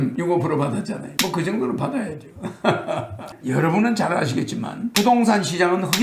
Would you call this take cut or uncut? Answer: uncut